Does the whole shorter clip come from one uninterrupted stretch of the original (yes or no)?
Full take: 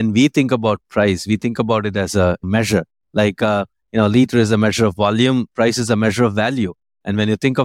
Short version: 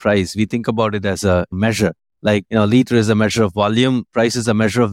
no